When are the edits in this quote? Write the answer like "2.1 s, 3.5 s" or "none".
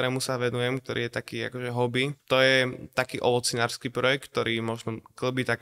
2.2 s